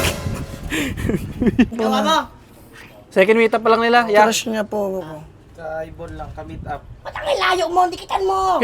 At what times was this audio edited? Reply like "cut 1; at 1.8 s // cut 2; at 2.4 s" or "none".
cut 1; at 1.7 s